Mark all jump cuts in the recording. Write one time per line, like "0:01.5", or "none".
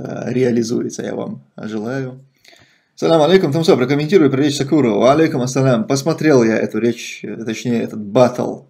0:02.2